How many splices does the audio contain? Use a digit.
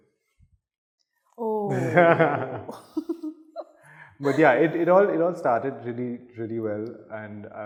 0